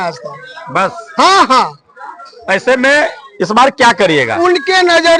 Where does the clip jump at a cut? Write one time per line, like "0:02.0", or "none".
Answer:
none